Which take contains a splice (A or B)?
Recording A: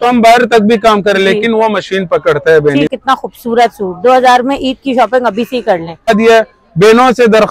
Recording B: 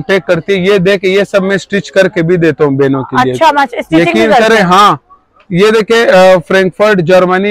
A